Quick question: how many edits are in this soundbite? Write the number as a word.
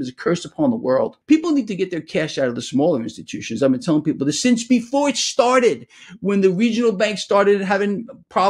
one